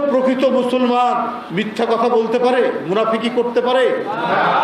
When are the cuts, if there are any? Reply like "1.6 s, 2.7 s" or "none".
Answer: 1.4 s